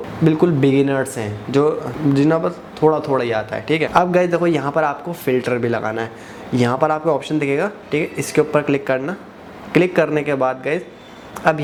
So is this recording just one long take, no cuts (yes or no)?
yes